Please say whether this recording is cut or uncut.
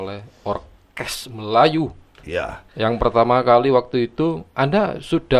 uncut